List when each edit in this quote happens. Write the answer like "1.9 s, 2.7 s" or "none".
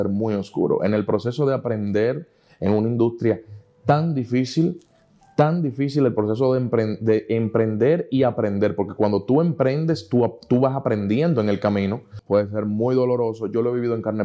12.1 s